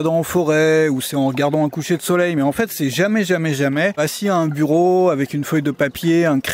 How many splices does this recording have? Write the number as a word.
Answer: one